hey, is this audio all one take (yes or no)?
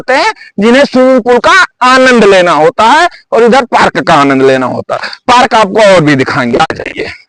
yes